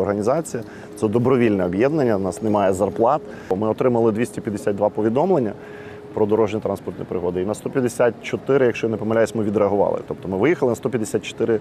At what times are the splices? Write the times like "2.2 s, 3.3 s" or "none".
3.5 s